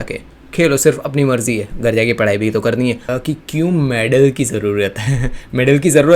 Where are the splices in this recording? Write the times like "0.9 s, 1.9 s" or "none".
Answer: 3.1 s